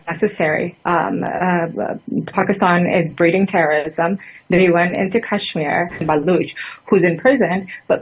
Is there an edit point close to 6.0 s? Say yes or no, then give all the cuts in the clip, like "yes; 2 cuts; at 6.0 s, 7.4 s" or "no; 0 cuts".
yes; 1 cut; at 6.0 s